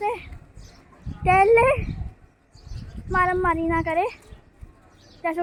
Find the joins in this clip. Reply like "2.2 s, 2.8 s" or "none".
none